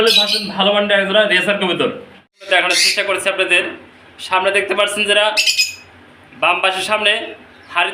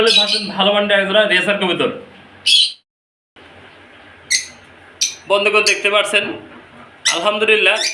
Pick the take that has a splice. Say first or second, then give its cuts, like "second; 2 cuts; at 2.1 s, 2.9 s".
first; 1 cut; at 2.5 s